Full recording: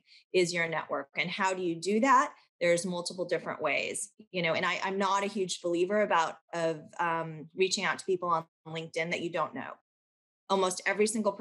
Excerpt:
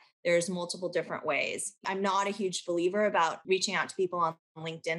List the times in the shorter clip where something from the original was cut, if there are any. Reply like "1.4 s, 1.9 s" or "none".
1.8 s, 3.4 s